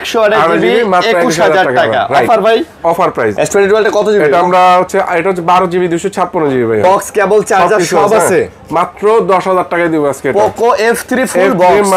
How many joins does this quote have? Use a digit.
2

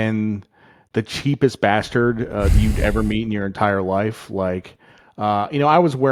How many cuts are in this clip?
0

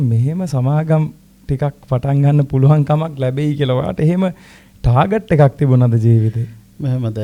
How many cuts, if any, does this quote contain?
0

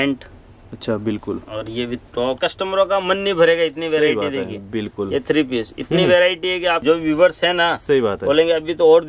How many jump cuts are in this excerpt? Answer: 2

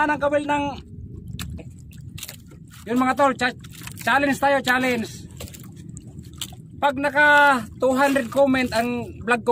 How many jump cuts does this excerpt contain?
1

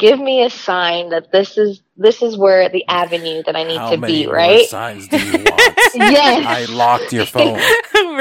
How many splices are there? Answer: 0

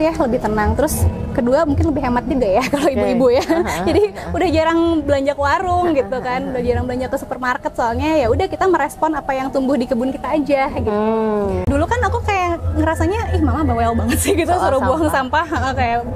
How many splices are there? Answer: 1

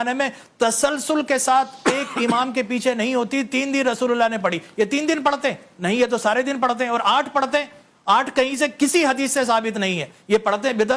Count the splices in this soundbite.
0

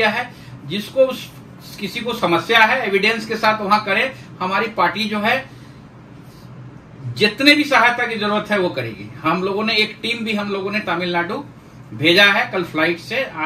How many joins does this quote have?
0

